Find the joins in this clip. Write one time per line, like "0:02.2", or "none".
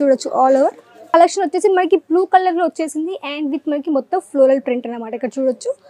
0:01.1

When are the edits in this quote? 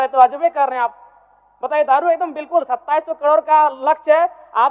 none

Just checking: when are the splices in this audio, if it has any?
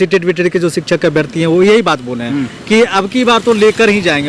none

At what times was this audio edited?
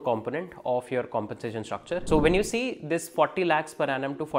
0:02.0

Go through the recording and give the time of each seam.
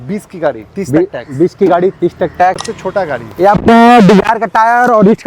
0:02.7

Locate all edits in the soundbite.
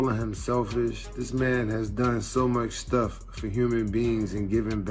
none

